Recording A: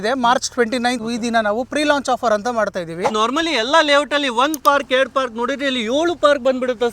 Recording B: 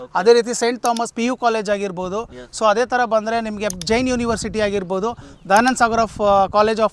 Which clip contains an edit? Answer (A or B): A